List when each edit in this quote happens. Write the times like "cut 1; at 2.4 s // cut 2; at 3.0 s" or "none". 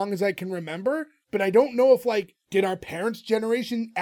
cut 1; at 1.1 s // cut 2; at 2.4 s